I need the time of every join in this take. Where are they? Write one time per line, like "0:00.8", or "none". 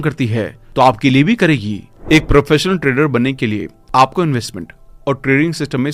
0:01.9

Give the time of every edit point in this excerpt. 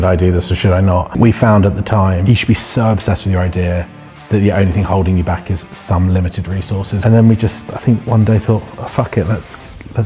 0:01.2
0:02.2
0:07.0

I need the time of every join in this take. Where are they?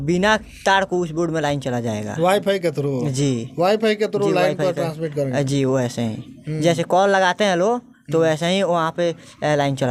none

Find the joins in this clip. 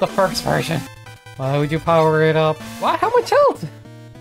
0:02.7

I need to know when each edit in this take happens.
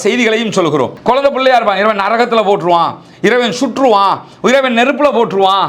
0:01.0

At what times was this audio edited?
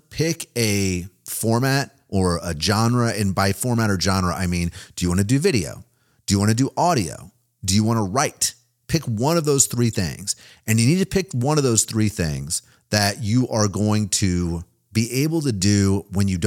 0:02.0
0:14.7

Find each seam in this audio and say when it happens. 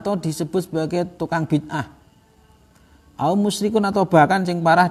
none

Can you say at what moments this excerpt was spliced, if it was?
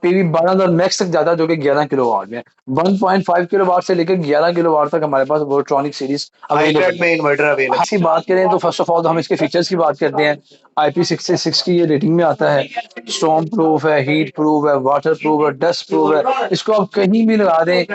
0:07.9

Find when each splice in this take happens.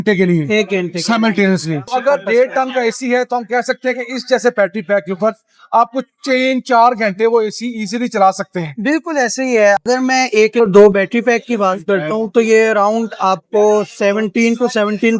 0:01.9
0:09.8

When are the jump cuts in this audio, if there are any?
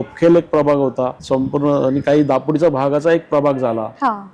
0:01.2

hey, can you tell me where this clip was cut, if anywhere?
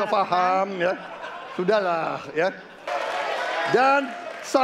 0:02.9

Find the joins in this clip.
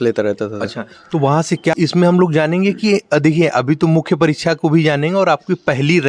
0:01.7

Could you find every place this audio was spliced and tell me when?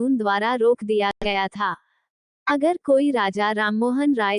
none

